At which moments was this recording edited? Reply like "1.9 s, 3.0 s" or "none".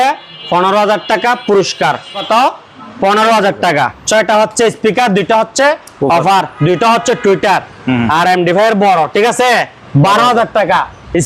2.2 s, 4.0 s, 9.8 s